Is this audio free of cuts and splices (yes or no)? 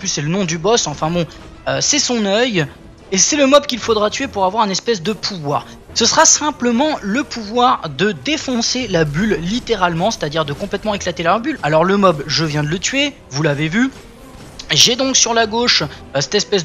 no